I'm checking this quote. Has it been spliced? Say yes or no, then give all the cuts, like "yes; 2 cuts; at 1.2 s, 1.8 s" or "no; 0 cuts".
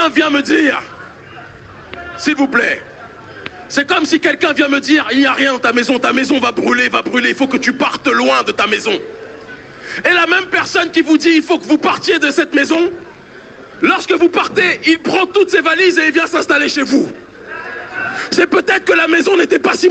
no; 0 cuts